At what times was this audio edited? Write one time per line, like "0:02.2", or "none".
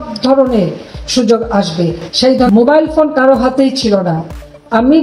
0:02.5